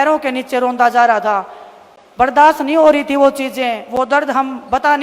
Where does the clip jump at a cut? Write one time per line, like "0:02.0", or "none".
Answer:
none